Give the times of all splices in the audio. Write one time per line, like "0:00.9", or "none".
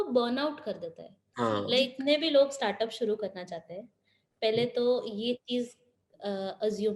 0:01.9